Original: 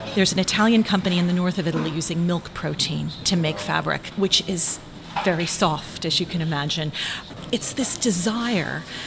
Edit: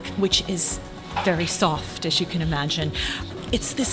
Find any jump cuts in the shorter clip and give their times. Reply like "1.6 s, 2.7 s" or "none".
none